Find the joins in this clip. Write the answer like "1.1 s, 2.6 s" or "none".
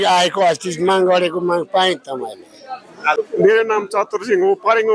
3.2 s